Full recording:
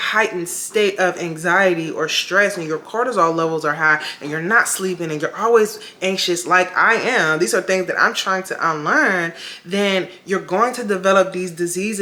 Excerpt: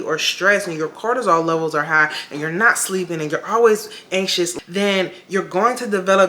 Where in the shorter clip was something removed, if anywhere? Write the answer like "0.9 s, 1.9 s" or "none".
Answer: 4.5 s

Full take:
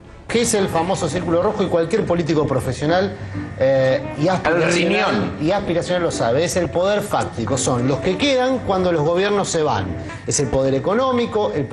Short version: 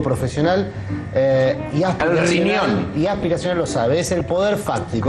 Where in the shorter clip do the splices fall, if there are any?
none

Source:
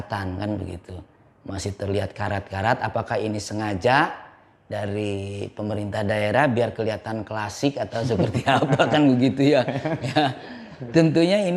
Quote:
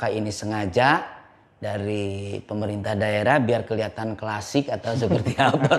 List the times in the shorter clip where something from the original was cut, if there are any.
none

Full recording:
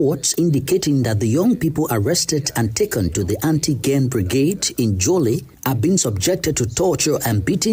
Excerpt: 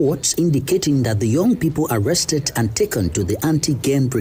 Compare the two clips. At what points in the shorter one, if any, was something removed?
none

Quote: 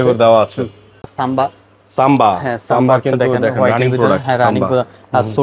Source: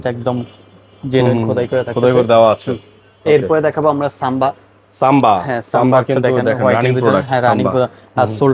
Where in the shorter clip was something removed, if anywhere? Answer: 1.1 s

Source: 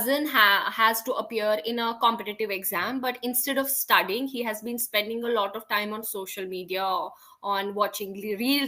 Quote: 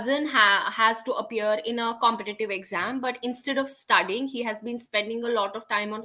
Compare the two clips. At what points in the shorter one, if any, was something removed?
none

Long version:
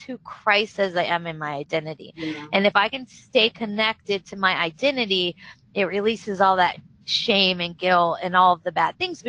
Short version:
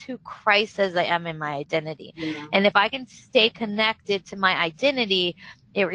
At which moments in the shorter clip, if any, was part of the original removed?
none

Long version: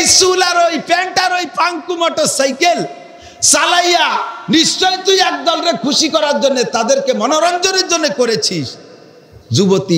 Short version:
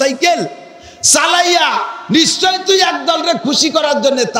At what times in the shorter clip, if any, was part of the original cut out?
none

